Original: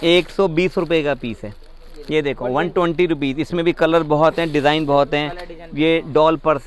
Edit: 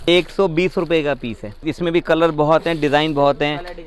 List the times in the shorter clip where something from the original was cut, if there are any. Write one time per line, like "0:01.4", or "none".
0:01.7